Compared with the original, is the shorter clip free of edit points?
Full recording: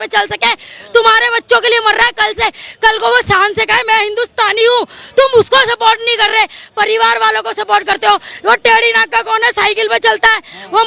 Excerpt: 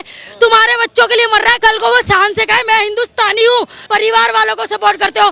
no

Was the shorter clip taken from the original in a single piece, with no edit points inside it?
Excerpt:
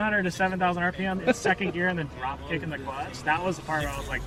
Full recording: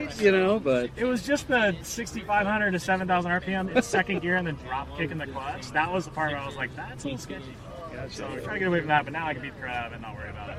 yes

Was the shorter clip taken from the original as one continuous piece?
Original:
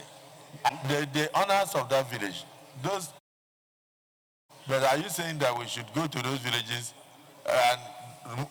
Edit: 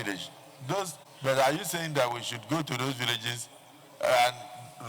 no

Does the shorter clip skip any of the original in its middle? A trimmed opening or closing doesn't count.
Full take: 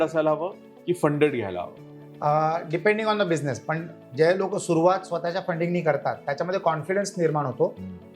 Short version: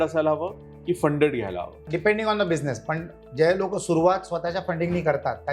yes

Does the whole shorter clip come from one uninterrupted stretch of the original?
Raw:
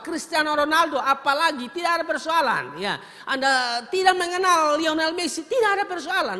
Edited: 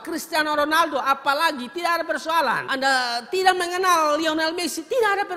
no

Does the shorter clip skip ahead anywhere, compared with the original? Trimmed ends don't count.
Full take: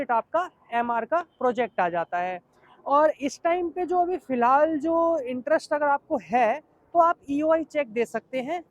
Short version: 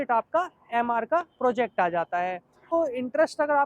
yes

